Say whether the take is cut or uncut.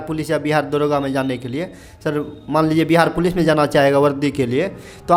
uncut